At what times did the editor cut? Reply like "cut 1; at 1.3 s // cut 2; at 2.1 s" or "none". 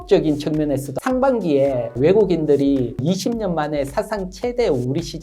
cut 1; at 0.9 s // cut 2; at 1.9 s // cut 3; at 3.0 s